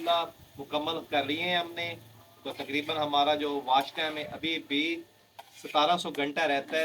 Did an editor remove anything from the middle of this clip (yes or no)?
no